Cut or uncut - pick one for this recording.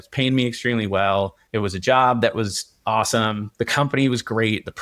cut